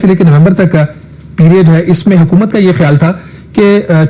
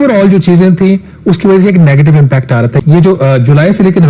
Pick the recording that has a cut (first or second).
second